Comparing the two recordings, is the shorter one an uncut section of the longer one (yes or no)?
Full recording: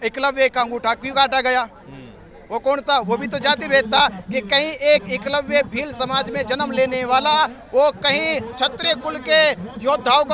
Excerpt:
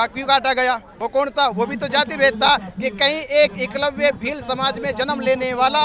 no